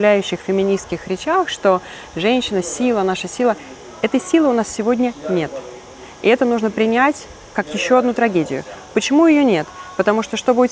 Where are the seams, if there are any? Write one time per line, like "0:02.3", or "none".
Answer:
none